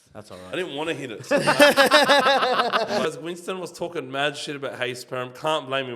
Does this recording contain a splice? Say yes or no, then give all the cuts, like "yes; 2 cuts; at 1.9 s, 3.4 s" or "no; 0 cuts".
yes; 1 cut; at 3.0 s